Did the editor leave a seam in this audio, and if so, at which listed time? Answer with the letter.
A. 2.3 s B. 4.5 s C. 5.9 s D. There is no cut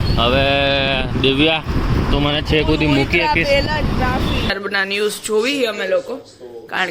B